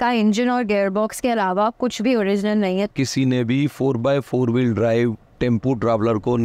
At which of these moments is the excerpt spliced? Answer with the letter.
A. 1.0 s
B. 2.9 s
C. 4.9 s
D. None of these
B